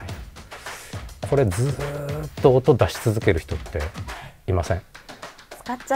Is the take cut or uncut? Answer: uncut